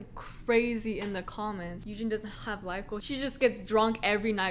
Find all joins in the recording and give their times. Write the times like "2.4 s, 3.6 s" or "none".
1.8 s, 3.0 s

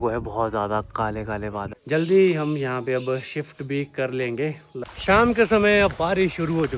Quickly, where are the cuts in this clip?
1.7 s, 4.9 s

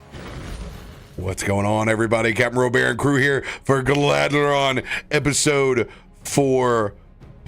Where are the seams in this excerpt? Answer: 1.0 s

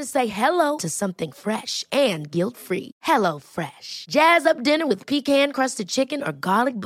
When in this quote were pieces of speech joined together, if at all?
none

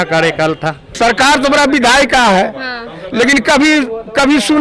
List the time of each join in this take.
0.9 s

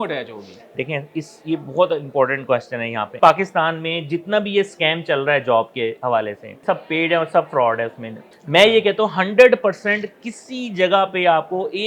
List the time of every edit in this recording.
3.2 s, 6.6 s, 8.2 s

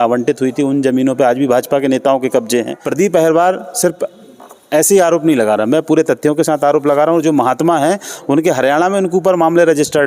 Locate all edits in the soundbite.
2.8 s

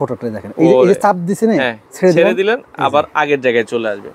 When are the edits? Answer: 1.8 s

